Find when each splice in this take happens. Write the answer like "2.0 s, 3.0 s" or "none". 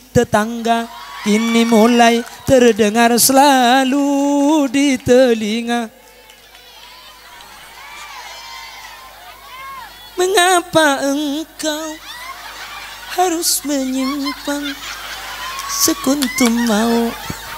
none